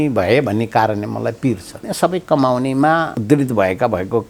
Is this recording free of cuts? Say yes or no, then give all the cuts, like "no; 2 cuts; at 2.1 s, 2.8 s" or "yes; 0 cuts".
no; 2 cuts; at 1.8 s, 3.1 s